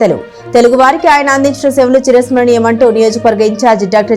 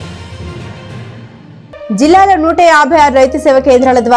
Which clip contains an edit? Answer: second; 1 cut; at 1.3 s

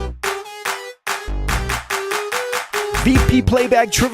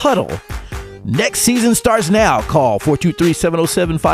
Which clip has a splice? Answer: first; 1 cut; at 3.0 s

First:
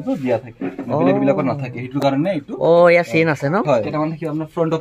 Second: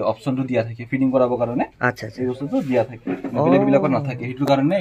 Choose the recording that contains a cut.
first; 1 cut; at 3.9 s

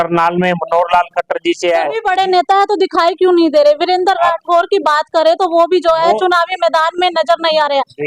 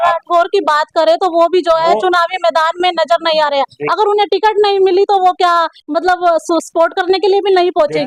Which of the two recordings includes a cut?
first; 1 cut; at 1.9 s

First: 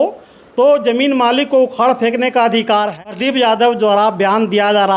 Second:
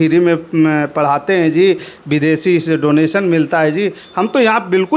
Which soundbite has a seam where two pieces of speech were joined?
first; 1 cut; at 3.0 s

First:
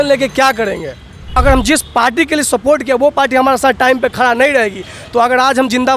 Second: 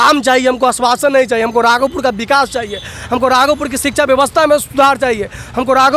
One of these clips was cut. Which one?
first; 1 cut; at 1.4 s

